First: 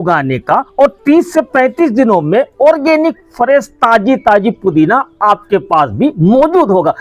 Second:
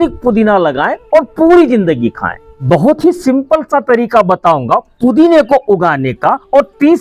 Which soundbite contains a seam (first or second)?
second